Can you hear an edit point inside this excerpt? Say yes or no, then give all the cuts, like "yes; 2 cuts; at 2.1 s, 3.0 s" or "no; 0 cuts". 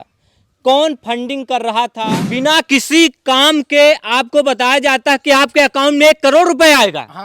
yes; 1 cut; at 2.0 s